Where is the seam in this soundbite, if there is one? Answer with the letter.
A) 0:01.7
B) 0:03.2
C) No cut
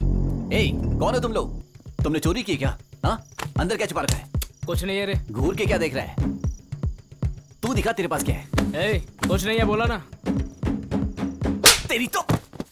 A